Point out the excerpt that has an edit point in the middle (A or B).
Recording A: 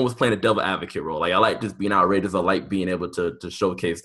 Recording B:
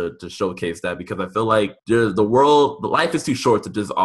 B